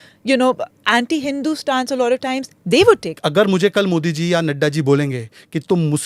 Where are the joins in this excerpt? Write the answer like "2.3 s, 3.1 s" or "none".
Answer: 3.2 s